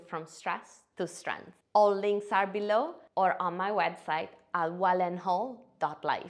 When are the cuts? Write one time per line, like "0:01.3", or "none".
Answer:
none